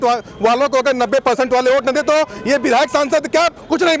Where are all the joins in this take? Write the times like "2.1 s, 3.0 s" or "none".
none